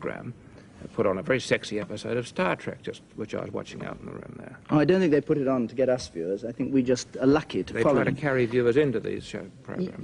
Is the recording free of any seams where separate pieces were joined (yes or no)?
yes